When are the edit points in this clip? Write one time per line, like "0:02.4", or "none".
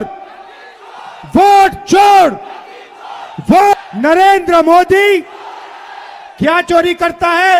0:03.7